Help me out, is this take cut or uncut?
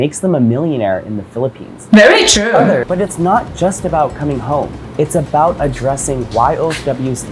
cut